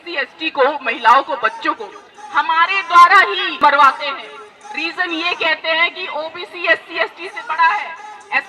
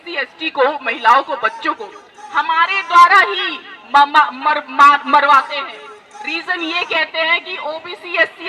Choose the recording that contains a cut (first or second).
first